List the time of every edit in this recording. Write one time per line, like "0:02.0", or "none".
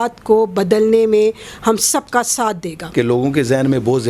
0:02.8